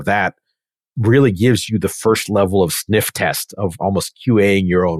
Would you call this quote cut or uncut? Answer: uncut